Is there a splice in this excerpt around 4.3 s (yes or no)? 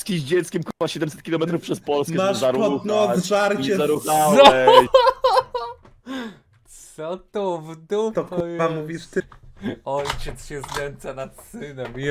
yes